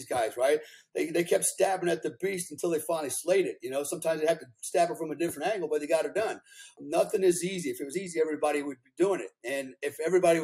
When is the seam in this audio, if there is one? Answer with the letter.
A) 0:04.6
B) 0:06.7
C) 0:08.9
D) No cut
B